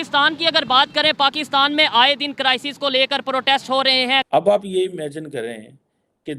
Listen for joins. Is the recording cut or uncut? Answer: cut